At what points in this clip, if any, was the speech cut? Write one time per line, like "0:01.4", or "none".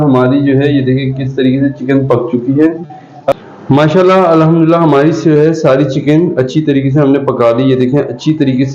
0:03.3